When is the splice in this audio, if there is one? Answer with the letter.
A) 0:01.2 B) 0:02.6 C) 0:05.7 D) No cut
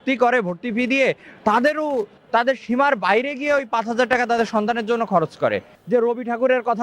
C